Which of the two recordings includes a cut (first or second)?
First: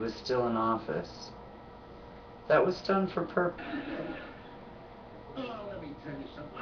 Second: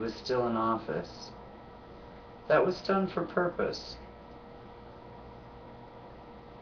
second